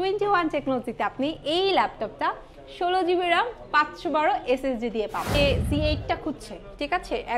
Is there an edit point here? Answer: yes; 1 cut; at 5.3 s

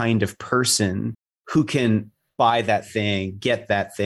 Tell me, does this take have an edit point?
yes; 1 cut; at 2.2 s

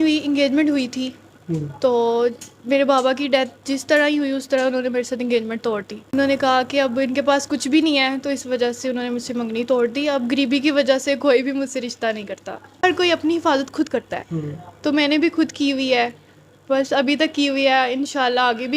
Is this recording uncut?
no; 2 cuts; at 6.1 s, 12.8 s

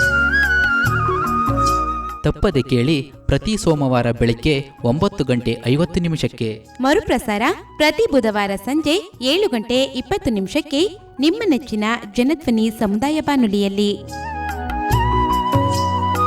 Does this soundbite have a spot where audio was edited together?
yes; 1 cut; at 1.9 s

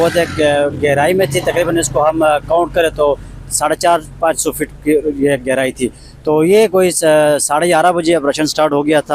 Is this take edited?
no; 0 cuts

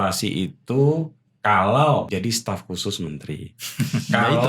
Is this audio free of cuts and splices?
no; 1 cut; at 2.1 s

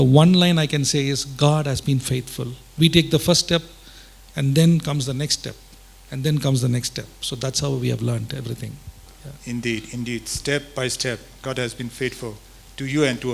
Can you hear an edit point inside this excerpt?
no; 0 cuts

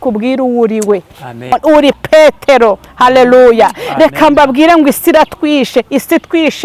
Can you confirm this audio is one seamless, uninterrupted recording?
no; 1 cut; at 1.5 s

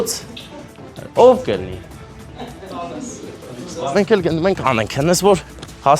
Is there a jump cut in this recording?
yes; 1 cut; at 3.8 s

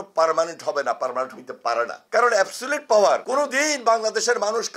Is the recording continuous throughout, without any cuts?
yes; 0 cuts

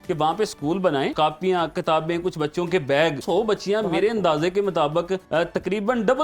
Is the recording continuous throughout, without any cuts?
no; 3 cuts; at 1.1 s, 3.2 s, 5.2 s

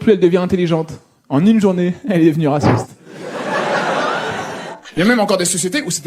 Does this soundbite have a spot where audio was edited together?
no; 0 cuts

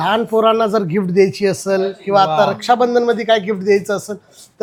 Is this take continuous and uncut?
yes; 0 cuts

